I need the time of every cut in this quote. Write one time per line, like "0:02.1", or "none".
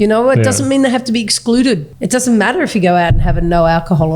0:01.9